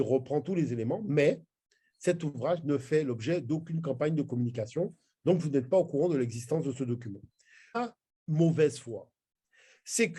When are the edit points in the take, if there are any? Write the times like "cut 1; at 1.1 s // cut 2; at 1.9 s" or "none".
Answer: cut 1; at 7.8 s